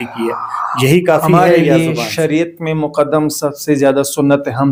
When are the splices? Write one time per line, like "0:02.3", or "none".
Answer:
none